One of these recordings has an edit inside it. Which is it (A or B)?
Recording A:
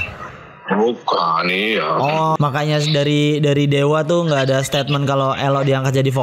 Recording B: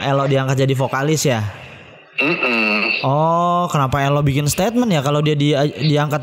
A